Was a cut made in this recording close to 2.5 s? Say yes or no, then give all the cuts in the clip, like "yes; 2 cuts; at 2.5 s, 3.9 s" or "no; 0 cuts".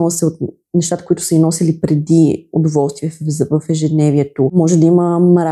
no; 1 cut; at 4.6 s